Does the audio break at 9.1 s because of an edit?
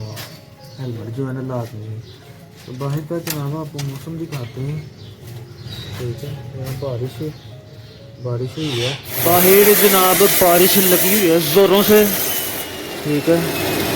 yes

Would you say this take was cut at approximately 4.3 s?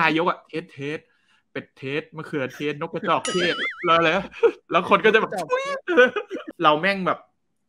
no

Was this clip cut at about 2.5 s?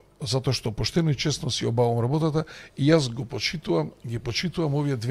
no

